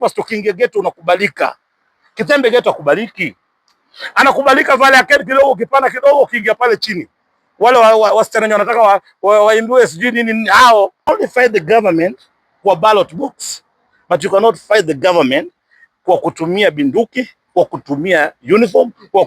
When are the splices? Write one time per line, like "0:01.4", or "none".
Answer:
0:11.1